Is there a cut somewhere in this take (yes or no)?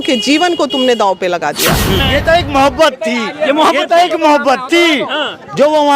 yes